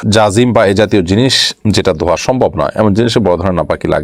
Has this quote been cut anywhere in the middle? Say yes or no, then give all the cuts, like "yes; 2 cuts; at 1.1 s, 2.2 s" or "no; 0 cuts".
no; 0 cuts